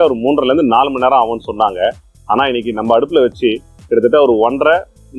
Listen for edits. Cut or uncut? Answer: uncut